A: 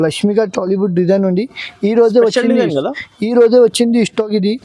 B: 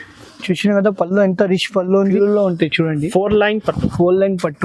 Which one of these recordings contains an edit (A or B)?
B